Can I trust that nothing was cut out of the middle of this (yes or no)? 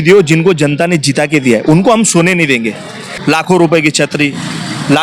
no